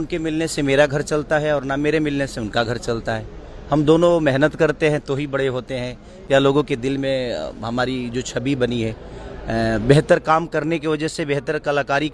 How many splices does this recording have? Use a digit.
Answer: 0